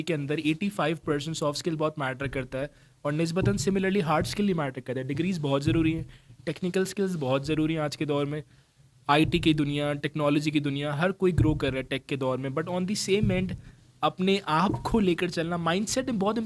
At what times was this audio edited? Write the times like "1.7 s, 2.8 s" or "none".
none